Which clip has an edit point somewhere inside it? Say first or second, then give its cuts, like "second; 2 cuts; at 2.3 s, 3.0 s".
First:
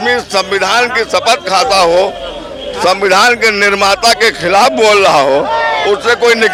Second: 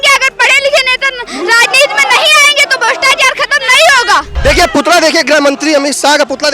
second; 1 cut; at 4.3 s